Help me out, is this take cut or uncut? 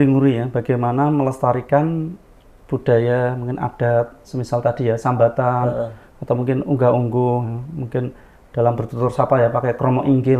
uncut